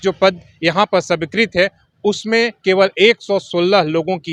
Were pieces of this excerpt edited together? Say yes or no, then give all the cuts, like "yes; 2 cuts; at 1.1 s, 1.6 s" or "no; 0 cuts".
no; 0 cuts